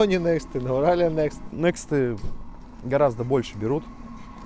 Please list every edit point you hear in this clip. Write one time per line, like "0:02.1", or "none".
0:01.4